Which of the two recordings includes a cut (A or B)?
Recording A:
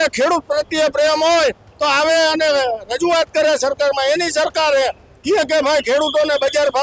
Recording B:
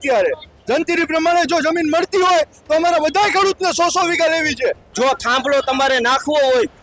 B